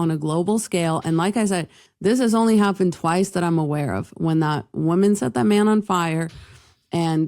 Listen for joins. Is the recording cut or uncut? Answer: uncut